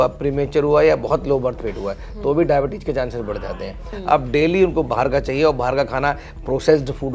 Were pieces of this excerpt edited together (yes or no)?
yes